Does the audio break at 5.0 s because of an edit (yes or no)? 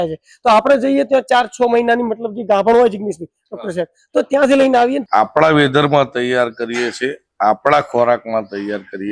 yes